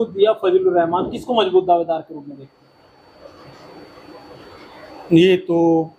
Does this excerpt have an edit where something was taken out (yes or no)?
no